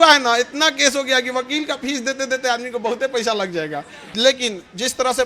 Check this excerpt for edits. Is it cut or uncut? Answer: cut